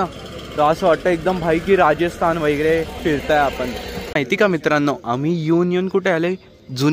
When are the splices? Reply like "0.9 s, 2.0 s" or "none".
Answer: 4.1 s